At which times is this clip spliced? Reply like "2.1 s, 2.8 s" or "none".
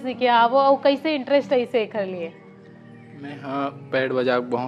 none